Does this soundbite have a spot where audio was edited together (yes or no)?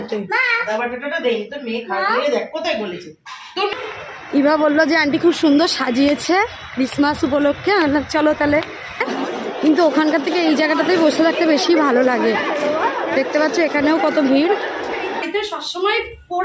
yes